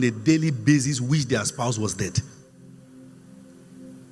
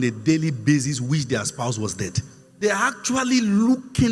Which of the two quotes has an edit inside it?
second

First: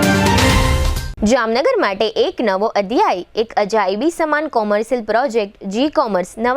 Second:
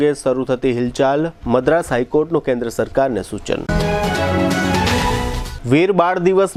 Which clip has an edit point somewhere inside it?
first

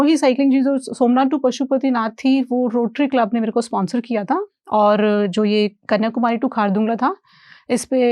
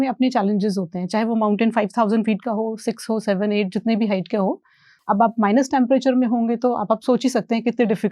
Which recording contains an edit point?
second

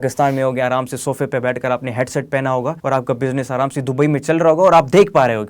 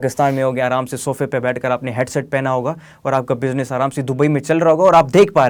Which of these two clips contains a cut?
first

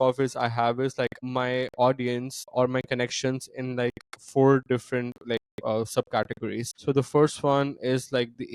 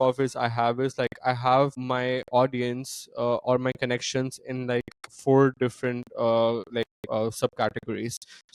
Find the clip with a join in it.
first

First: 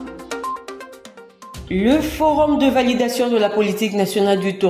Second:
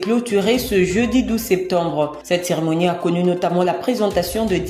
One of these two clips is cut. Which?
first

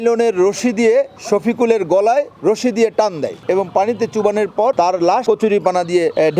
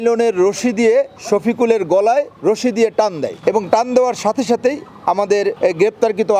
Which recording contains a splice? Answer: first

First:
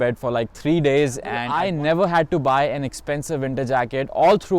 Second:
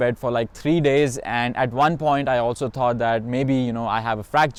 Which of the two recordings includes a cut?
first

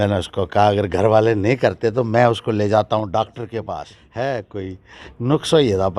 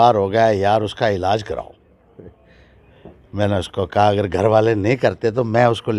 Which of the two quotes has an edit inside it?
first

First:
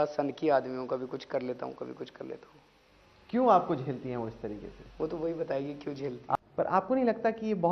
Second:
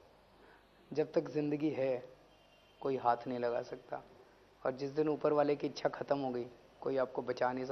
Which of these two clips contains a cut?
first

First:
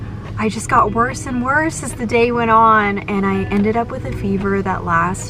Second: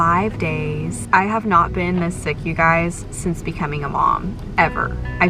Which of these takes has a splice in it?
second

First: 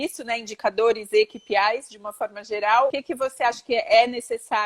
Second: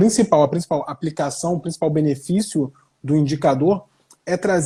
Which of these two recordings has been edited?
first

